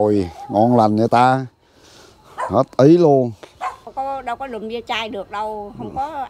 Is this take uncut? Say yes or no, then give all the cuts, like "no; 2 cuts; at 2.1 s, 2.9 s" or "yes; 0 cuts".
no; 1 cut; at 3.8 s